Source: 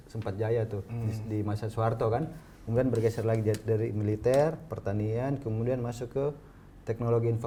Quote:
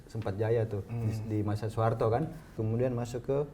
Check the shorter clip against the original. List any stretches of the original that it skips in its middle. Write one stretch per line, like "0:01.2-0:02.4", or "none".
0:02.6-0:05.4